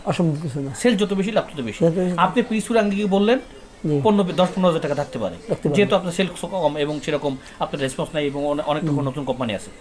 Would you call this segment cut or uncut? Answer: uncut